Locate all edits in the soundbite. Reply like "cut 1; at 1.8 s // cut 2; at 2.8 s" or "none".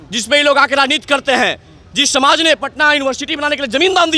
none